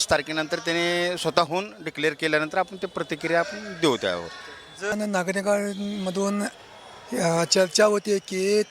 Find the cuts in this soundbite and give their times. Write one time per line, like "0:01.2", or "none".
0:04.9